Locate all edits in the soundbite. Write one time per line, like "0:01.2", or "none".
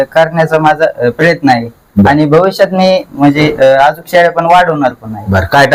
none